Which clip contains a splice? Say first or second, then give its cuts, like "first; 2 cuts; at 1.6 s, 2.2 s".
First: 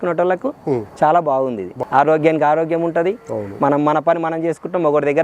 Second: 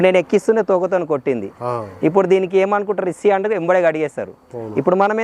first; 1 cut; at 1.7 s